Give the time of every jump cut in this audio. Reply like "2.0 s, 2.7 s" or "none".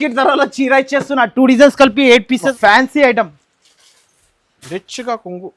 2.5 s